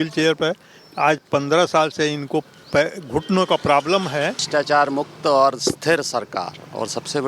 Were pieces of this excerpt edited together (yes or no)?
yes